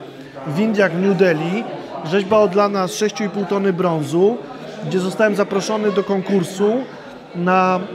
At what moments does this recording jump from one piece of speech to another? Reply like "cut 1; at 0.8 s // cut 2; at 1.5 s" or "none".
none